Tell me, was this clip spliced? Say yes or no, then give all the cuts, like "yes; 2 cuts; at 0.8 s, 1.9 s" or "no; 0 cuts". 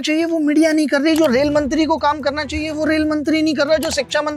no; 0 cuts